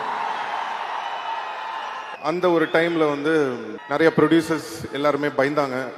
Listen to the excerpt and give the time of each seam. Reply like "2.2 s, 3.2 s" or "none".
2.1 s, 3.7 s